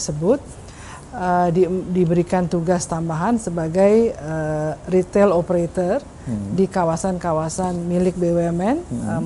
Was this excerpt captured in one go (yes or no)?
yes